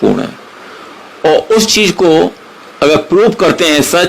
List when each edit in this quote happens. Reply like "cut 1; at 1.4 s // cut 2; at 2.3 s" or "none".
none